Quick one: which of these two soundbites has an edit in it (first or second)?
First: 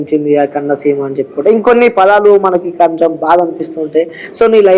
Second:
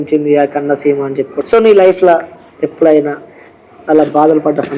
second